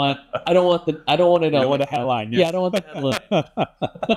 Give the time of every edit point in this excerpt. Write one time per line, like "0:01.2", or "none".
none

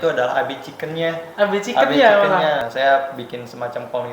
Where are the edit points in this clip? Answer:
0:02.6

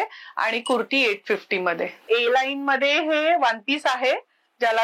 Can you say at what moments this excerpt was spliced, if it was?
0:02.0

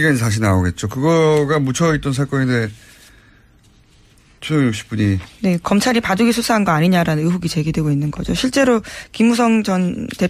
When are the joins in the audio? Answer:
0:06.2

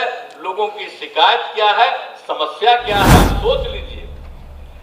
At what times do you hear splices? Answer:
0:03.3

